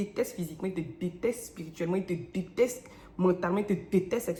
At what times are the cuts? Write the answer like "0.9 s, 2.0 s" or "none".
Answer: none